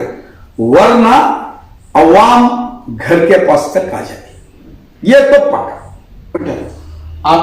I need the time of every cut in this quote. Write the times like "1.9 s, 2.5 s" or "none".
6.5 s